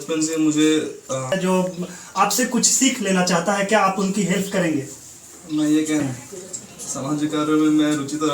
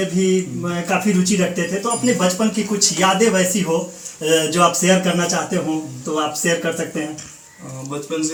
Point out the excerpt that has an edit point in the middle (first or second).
first